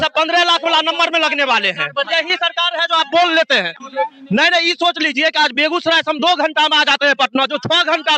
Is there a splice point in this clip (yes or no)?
yes